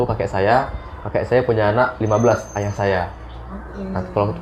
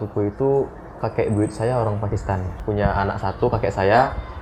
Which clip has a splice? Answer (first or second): second